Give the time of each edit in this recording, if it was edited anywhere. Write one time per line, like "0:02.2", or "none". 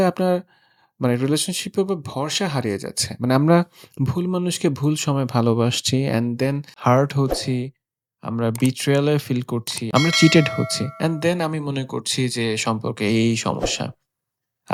none